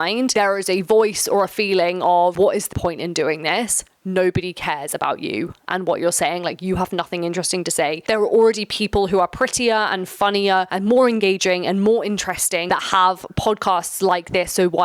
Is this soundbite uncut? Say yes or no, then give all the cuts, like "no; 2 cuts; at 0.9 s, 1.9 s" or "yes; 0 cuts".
no; 3 cuts; at 2.7 s, 8.0 s, 10.7 s